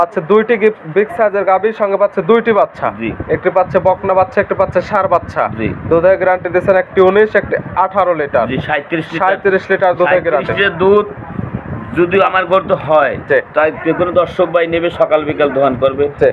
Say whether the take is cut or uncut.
uncut